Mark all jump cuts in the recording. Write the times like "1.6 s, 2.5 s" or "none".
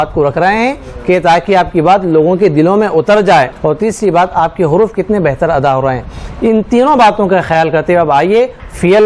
3.5 s